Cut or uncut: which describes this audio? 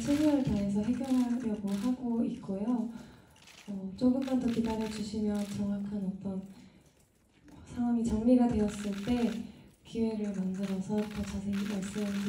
uncut